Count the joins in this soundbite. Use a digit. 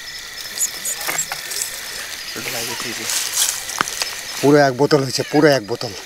0